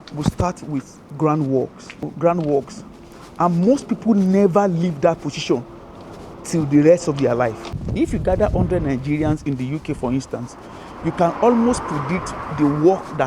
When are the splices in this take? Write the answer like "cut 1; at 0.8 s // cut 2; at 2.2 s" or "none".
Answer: cut 1; at 2.1 s // cut 2; at 7.6 s